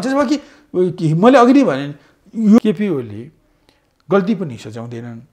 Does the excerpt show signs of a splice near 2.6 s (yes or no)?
yes